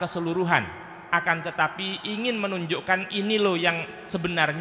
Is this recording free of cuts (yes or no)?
yes